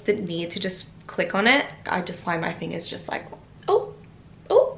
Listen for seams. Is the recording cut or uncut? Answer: uncut